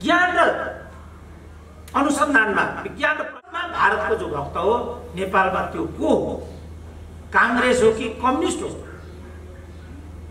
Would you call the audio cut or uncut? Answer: cut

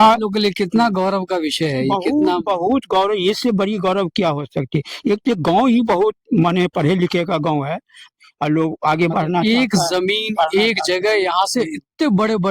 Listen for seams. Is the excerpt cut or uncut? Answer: cut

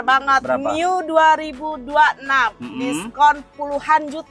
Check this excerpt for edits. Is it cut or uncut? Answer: uncut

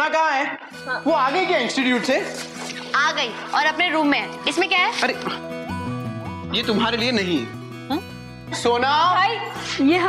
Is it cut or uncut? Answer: uncut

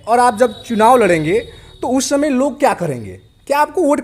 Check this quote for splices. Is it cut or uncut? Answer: uncut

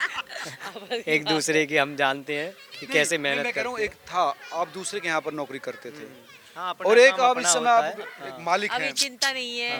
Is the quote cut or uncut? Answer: uncut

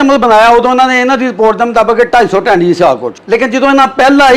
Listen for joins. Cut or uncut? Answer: cut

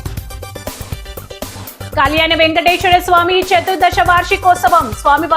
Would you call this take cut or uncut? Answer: cut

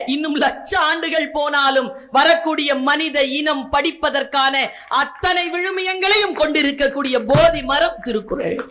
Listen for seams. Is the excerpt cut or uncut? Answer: uncut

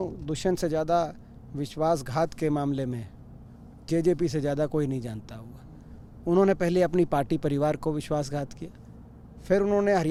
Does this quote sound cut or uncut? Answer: uncut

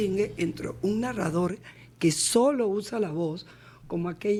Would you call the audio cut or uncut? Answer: uncut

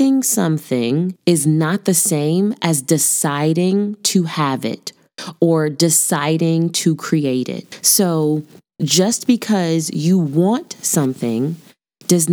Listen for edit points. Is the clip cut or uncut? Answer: cut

